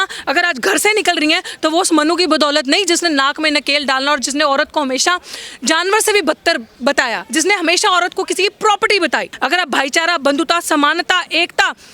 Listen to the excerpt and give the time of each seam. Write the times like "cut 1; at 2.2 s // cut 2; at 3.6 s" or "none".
cut 1; at 9.3 s